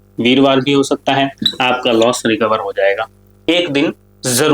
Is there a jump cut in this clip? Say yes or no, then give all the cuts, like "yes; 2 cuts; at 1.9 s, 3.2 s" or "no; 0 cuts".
yes; 2 cuts; at 1.4 s, 3.4 s